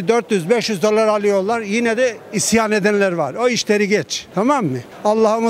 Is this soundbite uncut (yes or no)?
yes